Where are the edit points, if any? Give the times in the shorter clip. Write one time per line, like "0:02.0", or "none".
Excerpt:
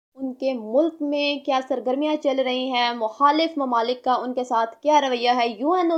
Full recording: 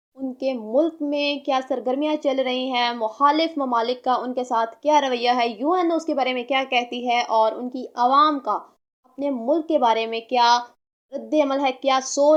none